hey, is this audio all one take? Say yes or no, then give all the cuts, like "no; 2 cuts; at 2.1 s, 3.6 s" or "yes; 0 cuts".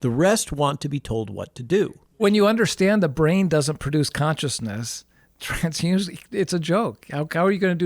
no; 1 cut; at 2.2 s